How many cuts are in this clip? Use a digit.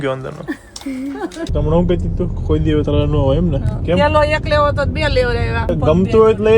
3